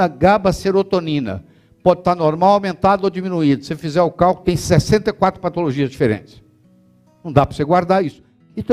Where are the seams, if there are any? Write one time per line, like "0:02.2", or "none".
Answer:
none